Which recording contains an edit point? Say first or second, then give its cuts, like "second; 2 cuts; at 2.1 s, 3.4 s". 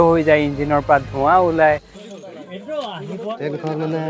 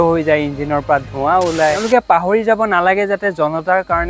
second; 1 cut; at 1.8 s